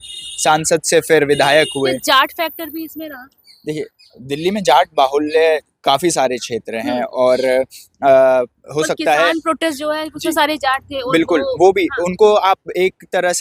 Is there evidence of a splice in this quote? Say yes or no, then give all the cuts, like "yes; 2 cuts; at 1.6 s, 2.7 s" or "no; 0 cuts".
no; 0 cuts